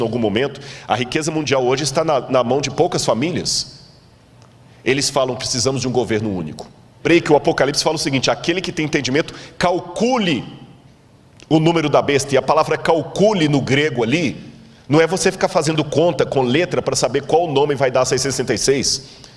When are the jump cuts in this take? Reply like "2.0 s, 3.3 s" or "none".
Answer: 7.0 s